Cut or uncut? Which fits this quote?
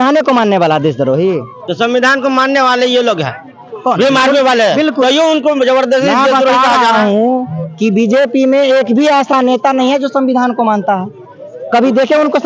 uncut